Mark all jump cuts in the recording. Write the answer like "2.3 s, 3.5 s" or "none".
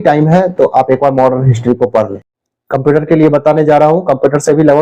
2.3 s